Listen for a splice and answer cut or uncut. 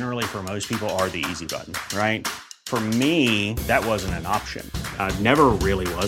uncut